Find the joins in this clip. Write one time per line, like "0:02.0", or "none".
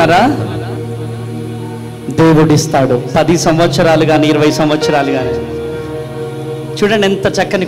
none

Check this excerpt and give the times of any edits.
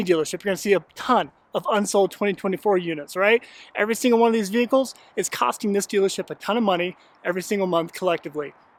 none

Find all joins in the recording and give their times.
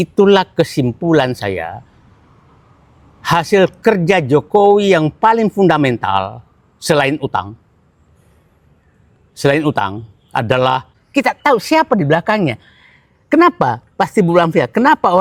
0:11.0

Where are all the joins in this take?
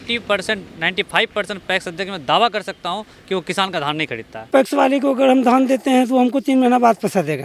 0:04.3

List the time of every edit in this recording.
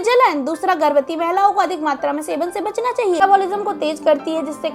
0:03.2

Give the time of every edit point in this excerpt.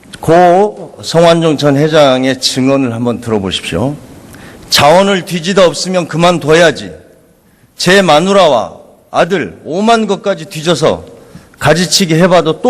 0:04.3

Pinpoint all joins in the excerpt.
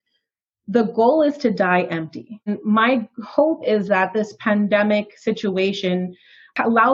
0:02.5

